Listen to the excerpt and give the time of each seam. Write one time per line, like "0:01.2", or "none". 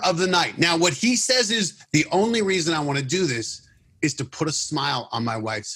none